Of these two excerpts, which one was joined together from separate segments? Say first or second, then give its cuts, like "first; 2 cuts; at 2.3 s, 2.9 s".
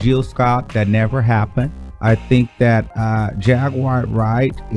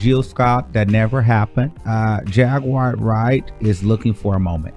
second; 1 cut; at 1.8 s